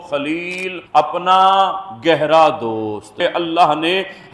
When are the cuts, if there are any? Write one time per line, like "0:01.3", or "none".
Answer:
0:03.2